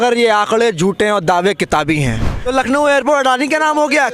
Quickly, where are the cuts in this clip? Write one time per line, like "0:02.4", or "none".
0:02.5